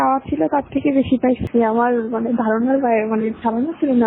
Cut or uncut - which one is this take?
cut